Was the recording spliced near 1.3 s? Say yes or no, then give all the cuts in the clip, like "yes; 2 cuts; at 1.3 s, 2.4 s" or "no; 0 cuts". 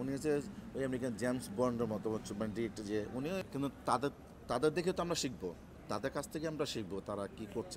no; 1 cut; at 3.4 s